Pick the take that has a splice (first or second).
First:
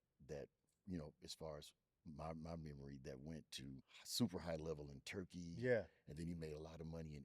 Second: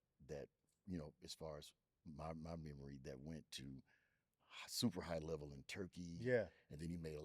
first